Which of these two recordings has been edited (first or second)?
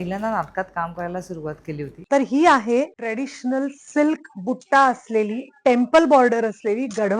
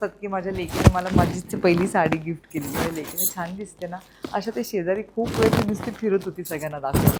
first